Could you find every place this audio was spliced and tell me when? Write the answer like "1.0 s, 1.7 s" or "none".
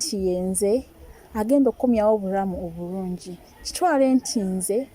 none